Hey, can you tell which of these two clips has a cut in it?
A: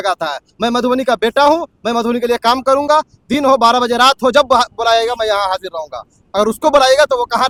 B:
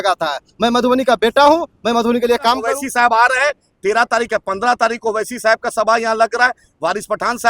B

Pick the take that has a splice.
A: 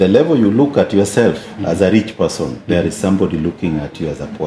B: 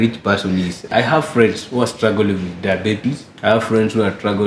B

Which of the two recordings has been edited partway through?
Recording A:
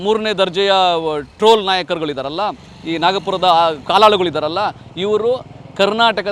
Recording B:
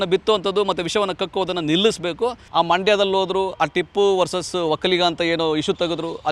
B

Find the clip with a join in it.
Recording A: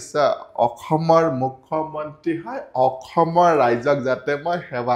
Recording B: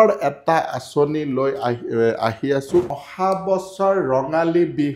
B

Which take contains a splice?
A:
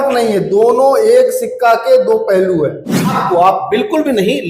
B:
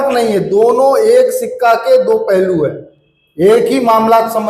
A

